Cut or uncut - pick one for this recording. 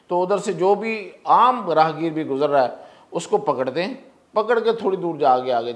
uncut